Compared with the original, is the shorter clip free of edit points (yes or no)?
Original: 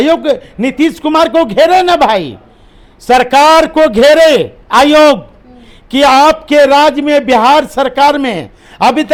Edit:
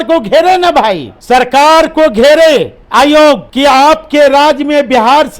no